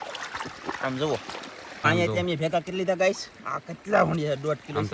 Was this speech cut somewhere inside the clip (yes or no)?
yes